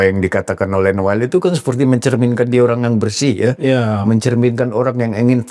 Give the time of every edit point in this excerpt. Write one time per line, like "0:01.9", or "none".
none